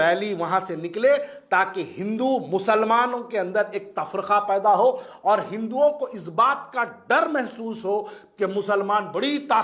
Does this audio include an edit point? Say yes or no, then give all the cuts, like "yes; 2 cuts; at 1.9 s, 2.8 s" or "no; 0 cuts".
no; 0 cuts